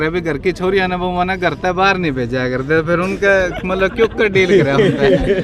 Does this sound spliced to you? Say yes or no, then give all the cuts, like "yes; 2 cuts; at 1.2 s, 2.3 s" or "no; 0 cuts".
no; 0 cuts